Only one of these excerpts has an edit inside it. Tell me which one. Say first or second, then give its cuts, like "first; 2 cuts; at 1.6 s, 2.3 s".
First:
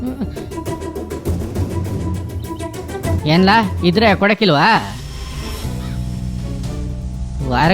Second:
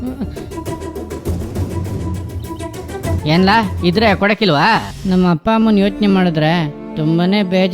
second; 1 cut; at 4.9 s